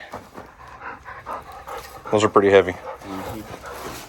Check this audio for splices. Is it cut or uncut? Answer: uncut